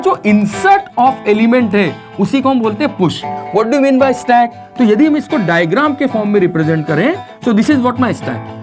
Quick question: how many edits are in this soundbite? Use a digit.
1